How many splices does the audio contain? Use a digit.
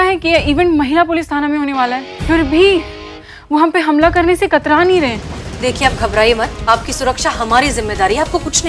0